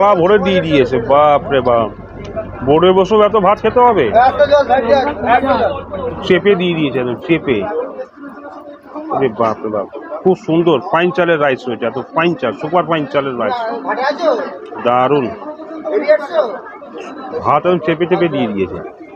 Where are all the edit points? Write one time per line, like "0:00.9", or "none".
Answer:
0:05.8